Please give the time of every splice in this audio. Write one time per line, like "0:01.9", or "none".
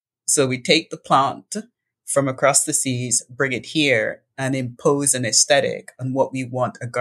none